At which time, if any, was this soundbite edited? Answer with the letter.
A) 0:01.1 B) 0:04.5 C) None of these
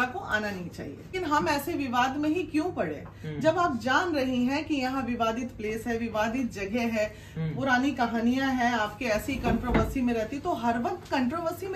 A